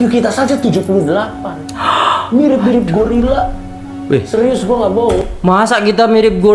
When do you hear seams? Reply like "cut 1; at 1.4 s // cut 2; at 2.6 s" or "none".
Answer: none